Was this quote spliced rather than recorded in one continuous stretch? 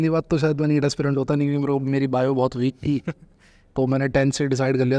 no; 0 cuts

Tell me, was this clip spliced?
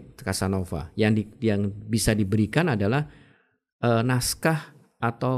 no; 0 cuts

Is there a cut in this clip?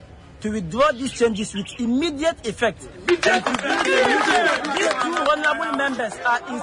yes; 1 cut; at 4.6 s

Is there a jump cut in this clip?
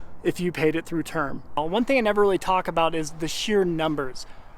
yes; 1 cut; at 1.5 s

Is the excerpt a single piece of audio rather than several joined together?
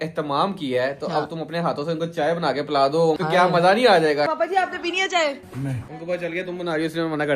no; 3 cuts; at 3.2 s, 4.3 s, 5.8 s

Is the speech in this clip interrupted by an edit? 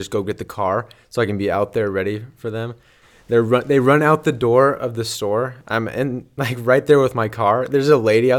yes; 1 cut; at 3.0 s

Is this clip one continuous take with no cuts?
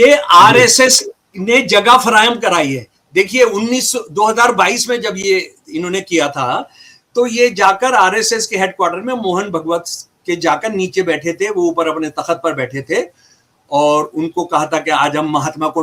yes; 0 cuts

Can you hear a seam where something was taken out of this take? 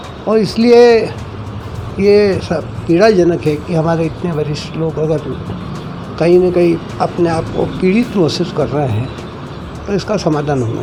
no; 0 cuts

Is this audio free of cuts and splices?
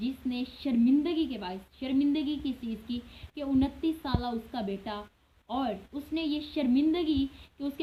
yes; 0 cuts

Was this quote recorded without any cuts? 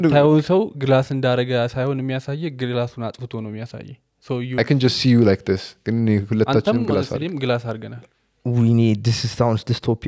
yes; 0 cuts

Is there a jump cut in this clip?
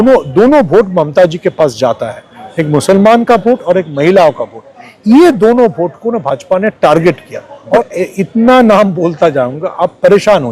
yes; 1 cut; at 7.8 s

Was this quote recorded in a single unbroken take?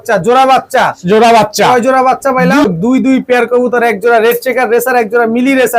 no; 1 cut; at 2.7 s

